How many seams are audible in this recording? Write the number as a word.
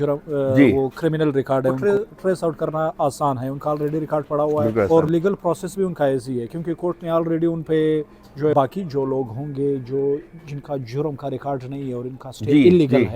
three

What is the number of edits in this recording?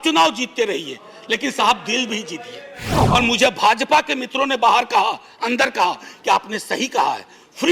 one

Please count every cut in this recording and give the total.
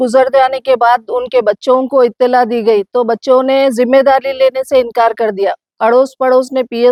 zero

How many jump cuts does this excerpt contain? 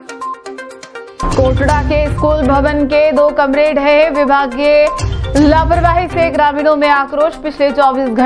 one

